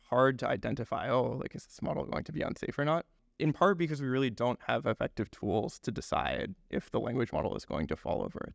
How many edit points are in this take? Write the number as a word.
one